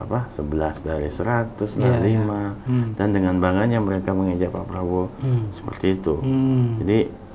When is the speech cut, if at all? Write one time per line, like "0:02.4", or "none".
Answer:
none